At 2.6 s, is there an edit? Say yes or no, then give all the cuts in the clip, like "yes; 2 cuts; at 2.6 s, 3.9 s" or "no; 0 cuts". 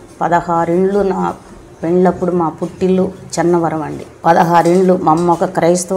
no; 1 cut; at 4.0 s